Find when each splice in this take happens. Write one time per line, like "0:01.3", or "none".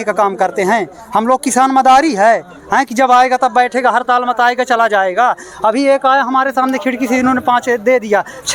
none